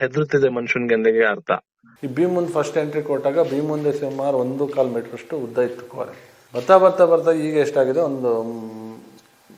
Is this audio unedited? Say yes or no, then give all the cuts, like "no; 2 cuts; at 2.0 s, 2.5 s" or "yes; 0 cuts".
no; 1 cut; at 1.8 s